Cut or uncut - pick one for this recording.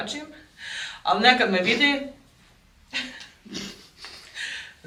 uncut